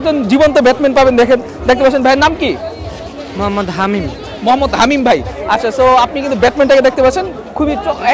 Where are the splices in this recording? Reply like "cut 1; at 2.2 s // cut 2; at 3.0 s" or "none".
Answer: none